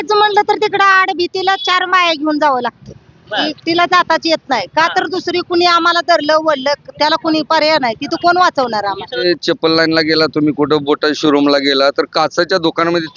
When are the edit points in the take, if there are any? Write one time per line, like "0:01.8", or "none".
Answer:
0:09.1